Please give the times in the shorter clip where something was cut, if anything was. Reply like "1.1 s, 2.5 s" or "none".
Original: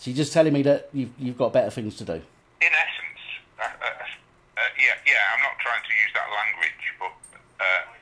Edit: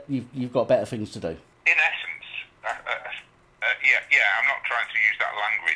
1.5 s